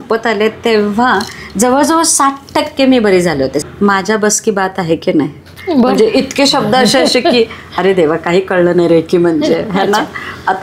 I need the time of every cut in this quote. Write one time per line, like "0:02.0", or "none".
0:03.6